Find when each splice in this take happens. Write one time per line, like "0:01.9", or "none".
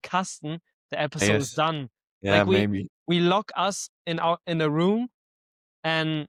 none